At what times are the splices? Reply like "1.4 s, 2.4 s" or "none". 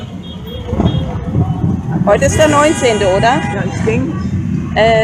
1.6 s